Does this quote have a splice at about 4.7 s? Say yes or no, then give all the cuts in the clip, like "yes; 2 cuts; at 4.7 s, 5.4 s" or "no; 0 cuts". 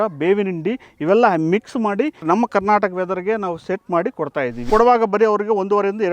yes; 2 cuts; at 2.2 s, 4.7 s